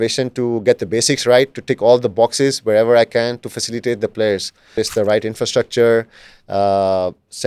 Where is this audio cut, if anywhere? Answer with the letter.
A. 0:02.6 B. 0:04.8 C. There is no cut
B